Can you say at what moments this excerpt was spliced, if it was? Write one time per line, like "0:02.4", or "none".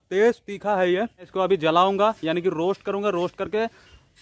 0:01.3